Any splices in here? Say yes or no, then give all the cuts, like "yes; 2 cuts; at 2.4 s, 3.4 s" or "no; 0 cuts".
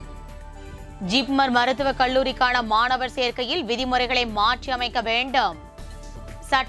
no; 0 cuts